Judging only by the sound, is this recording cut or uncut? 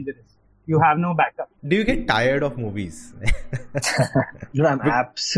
cut